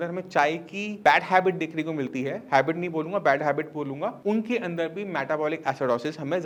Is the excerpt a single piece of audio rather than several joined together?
yes; 0 cuts

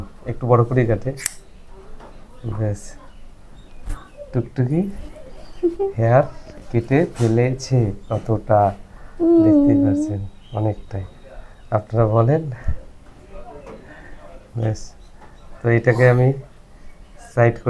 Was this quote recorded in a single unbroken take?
yes; 0 cuts

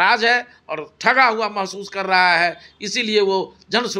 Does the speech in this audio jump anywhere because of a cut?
no; 0 cuts

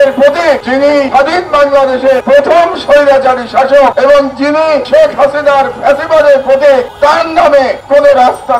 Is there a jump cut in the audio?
yes; 6 cuts; at 1.0 s, 2.2 s, 3.9 s, 4.8 s, 6.9 s, 7.8 s

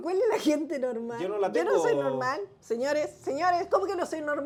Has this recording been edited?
no; 0 cuts

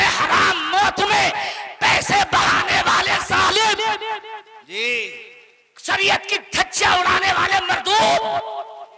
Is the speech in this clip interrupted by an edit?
no; 0 cuts

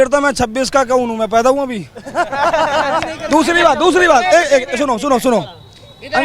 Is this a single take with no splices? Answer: yes; 0 cuts

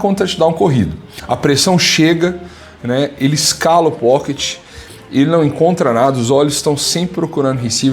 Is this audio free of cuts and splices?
no; 1 cut; at 1.1 s

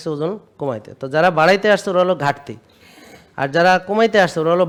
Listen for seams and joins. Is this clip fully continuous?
yes; 0 cuts

